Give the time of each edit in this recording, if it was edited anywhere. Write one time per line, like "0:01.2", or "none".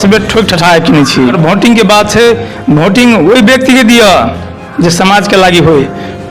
0:01.4